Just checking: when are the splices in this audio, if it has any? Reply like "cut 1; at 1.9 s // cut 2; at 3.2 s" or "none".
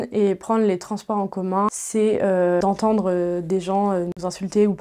cut 1; at 1.7 s // cut 2; at 2.6 s

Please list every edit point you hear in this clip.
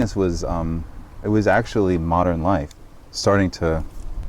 cut 1; at 2.8 s

